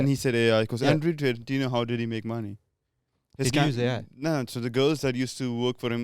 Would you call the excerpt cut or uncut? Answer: uncut